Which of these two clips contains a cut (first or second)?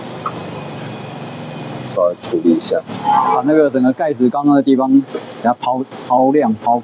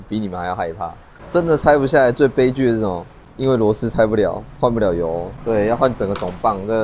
second